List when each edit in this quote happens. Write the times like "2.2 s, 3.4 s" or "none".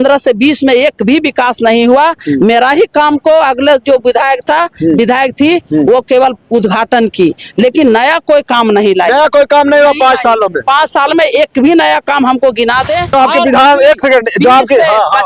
13.1 s